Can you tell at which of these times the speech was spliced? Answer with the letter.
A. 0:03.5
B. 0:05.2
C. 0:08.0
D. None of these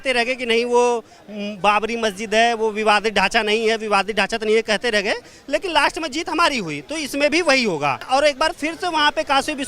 C